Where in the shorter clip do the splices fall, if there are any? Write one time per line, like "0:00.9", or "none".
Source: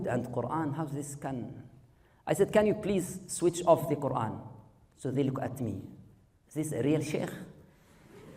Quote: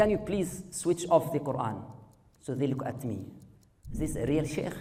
none